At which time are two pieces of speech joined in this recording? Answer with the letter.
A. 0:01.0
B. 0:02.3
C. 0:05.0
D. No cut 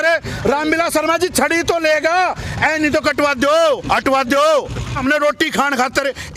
C